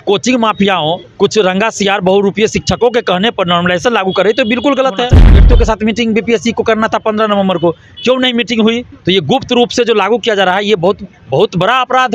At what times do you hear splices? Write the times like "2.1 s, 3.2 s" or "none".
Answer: 1.1 s, 5.5 s, 8.9 s, 11.1 s